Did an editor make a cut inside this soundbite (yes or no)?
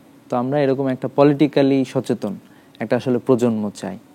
no